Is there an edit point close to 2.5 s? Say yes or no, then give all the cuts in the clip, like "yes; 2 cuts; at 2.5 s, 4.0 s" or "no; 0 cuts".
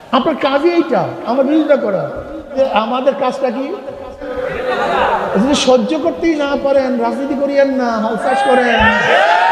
yes; 2 cuts; at 2.5 s, 4.4 s